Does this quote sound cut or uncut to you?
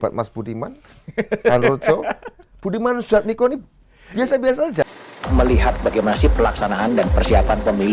cut